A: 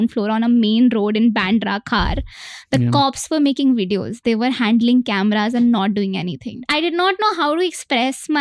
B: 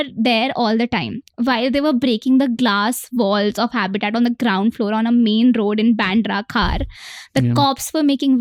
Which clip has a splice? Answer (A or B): A